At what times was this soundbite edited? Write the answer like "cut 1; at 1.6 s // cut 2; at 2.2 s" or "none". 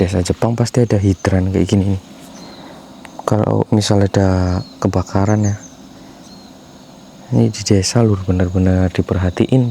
none